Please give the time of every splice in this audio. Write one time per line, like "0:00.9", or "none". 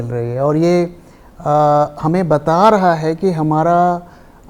none